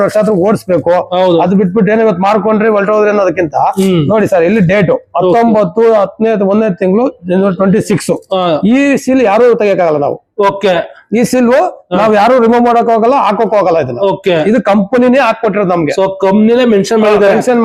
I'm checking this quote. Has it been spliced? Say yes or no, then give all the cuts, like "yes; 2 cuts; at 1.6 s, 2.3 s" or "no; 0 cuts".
no; 0 cuts